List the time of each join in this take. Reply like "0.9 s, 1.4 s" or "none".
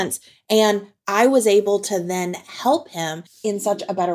3.2 s